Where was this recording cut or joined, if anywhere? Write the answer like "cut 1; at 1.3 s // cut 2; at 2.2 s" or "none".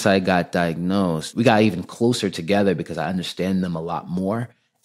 cut 1; at 1.3 s